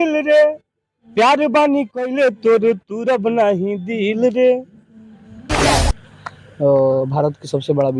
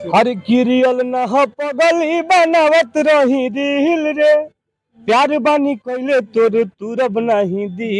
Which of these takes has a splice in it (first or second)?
first